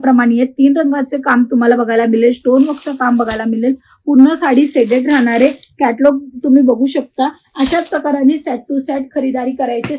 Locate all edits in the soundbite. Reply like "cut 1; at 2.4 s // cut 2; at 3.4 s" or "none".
none